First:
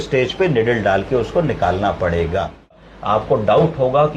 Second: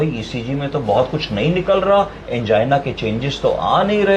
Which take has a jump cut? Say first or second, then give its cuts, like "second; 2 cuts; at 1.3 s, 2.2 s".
first; 1 cut; at 2.9 s